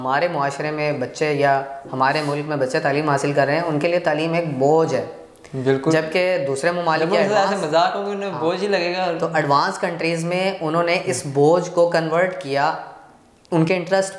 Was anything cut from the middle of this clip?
no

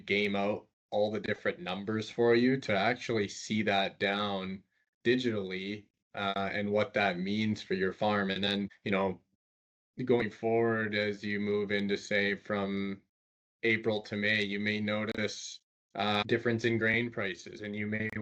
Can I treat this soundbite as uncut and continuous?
yes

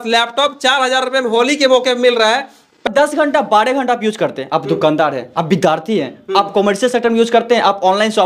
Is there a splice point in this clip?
yes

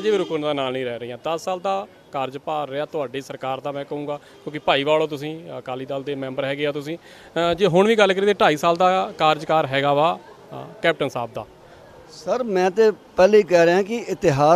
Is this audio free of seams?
yes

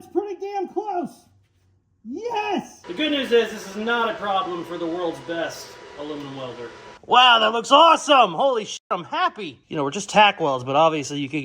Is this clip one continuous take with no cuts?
no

